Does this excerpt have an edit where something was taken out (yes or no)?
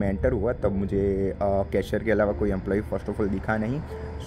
yes